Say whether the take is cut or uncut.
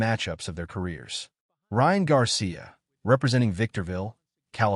uncut